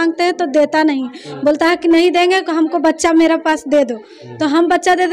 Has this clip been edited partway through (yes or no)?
no